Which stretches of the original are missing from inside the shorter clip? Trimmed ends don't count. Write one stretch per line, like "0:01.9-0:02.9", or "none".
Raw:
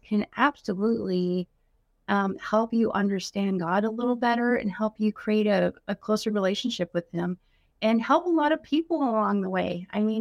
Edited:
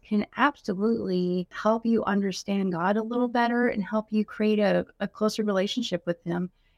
0:01.5-0:02.4